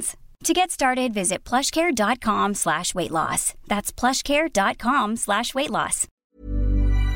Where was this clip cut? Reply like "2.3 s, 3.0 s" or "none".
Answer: 6.2 s